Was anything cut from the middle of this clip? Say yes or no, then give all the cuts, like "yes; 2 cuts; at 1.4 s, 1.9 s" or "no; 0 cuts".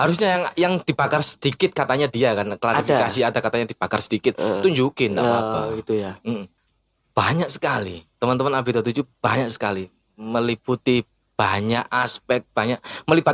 yes; 1 cut; at 6.6 s